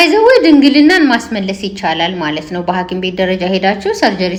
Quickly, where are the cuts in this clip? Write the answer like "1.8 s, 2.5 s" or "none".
none